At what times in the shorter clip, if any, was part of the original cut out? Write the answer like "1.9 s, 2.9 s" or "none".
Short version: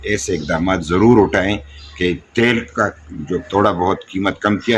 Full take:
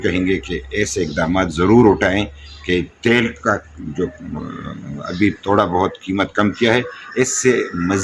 3.5 s